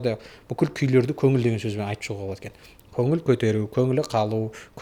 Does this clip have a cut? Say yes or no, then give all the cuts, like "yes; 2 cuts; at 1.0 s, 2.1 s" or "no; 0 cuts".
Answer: no; 0 cuts